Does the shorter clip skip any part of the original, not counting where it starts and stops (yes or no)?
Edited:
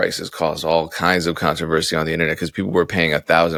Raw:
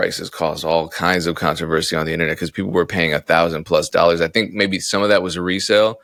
no